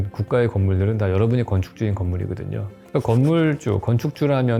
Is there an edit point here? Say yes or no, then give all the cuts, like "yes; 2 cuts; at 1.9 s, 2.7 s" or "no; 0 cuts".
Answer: no; 0 cuts